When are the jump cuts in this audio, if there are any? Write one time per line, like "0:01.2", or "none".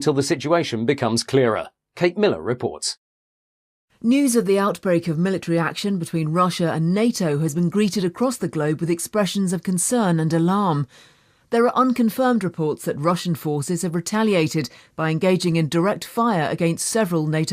0:09.5